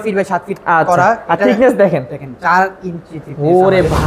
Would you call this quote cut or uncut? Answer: uncut